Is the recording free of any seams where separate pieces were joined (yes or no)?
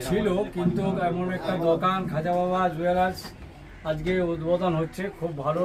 yes